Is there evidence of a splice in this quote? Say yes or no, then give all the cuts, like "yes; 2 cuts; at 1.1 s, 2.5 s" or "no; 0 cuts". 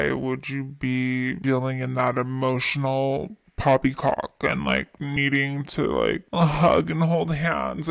no; 0 cuts